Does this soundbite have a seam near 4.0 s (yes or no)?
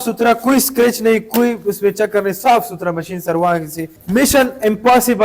yes